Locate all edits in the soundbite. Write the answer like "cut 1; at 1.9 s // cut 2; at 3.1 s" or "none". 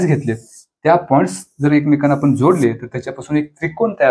none